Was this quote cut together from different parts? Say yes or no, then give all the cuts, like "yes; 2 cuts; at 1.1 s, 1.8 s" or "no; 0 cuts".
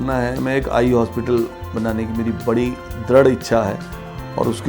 yes; 1 cut; at 1.6 s